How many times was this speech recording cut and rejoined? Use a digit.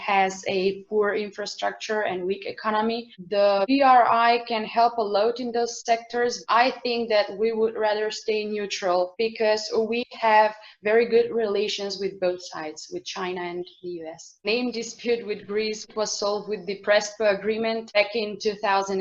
3